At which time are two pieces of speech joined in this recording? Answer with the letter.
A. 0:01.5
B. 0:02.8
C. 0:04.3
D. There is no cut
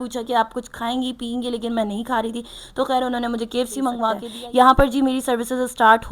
C